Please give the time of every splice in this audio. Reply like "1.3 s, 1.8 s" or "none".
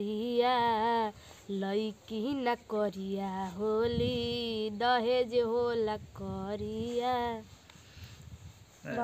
none